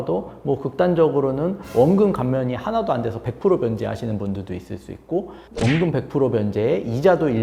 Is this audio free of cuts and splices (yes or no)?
yes